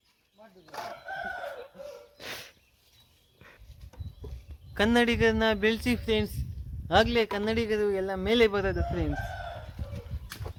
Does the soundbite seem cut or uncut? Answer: uncut